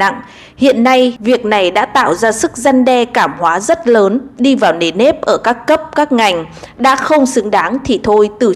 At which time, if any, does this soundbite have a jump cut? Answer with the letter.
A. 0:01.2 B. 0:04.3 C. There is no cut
A